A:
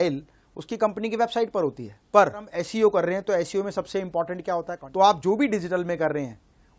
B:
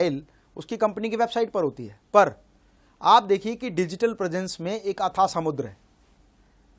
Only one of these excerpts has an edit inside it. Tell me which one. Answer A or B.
A